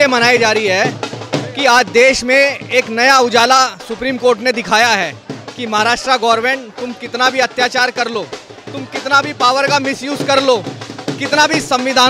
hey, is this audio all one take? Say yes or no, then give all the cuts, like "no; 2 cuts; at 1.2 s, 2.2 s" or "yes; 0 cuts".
yes; 0 cuts